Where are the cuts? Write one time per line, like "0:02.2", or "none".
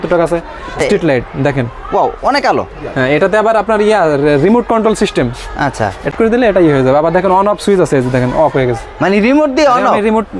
0:00.8
0:06.1